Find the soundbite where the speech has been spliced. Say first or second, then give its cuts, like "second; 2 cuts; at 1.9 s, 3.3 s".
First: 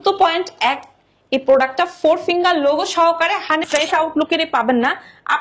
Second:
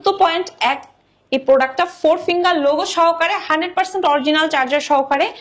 first; 1 cut; at 3.7 s